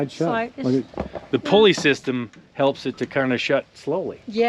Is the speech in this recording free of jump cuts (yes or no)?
yes